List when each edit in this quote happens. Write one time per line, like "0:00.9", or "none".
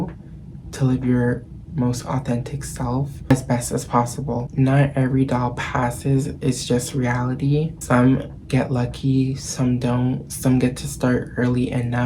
0:03.3
0:04.5
0:07.8